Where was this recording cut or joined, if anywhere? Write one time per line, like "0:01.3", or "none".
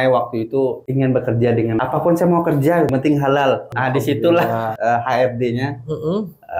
0:00.8
0:01.8
0:02.9
0:03.7
0:04.7